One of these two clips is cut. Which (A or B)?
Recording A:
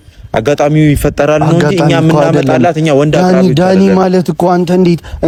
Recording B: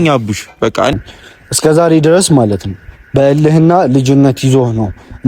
B